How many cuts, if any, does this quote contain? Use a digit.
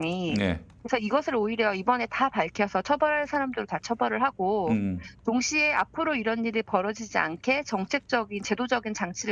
0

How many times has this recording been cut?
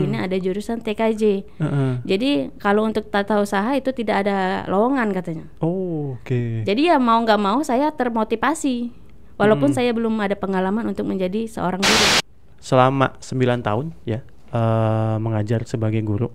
1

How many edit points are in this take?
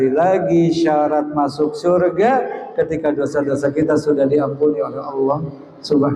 0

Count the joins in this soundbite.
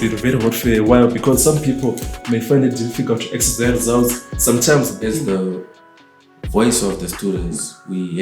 1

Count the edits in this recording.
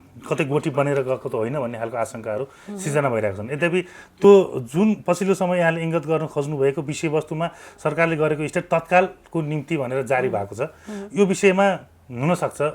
0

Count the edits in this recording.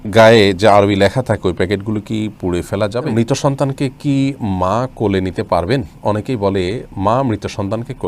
1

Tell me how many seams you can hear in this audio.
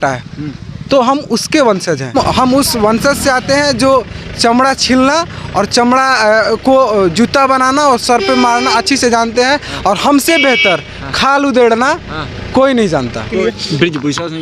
2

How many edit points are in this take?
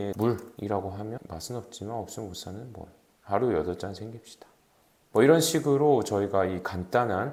0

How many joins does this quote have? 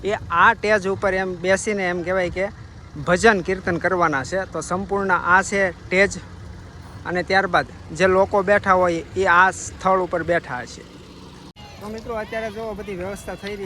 0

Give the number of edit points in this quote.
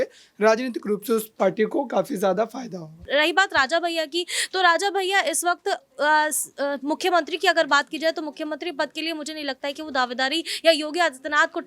1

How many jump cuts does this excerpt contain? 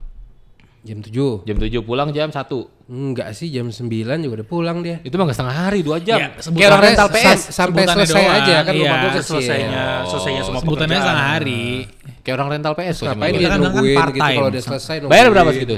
0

